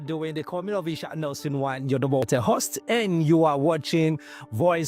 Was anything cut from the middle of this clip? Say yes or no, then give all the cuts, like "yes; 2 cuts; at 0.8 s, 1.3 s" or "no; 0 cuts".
yes; 1 cut; at 2.2 s